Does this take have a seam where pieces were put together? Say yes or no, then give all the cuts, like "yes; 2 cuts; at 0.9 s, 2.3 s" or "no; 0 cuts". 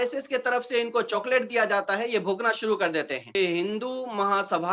yes; 1 cut; at 3.4 s